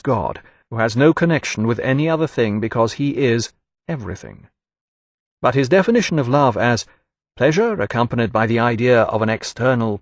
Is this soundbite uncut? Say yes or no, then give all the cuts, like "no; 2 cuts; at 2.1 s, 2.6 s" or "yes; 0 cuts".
yes; 0 cuts